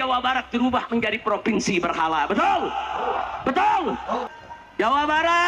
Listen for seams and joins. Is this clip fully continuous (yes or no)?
no